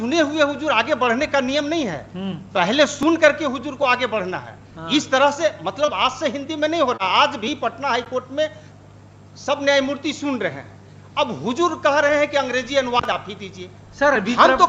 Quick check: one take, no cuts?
yes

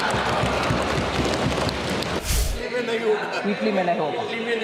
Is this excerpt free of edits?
no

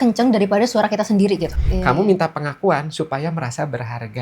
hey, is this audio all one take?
no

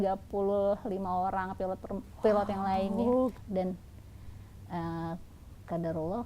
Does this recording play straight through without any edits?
no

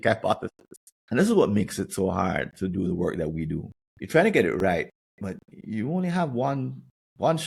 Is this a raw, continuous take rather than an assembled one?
yes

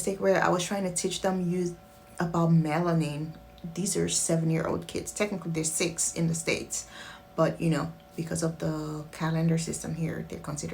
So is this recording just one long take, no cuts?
yes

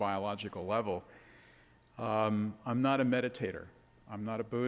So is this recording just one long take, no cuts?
yes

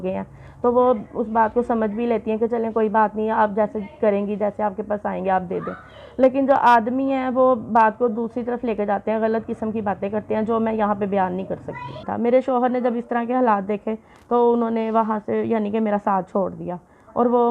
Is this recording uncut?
no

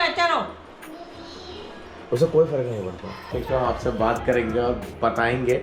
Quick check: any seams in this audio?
yes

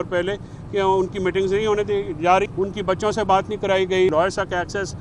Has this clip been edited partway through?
yes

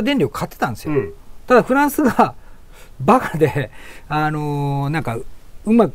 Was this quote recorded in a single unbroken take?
yes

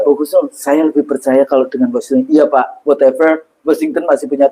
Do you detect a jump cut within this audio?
no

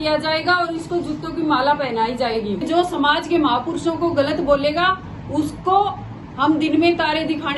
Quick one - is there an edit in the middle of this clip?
yes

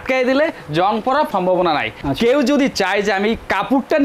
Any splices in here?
no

